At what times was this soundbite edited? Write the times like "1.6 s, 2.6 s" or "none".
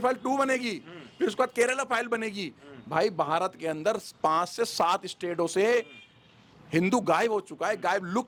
none